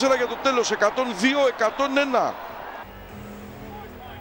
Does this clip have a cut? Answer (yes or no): yes